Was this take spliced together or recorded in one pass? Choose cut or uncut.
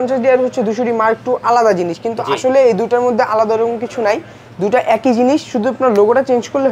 uncut